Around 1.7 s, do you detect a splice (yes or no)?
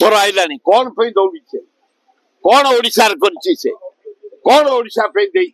no